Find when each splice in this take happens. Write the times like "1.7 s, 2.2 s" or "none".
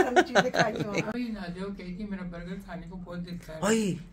1.1 s